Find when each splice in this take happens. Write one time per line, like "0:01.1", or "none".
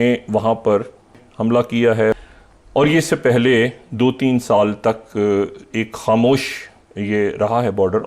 0:01.2
0:02.1